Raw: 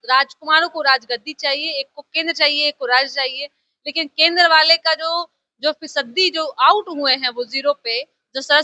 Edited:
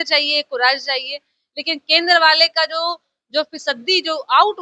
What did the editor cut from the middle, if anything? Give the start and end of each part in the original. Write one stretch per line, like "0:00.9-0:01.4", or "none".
none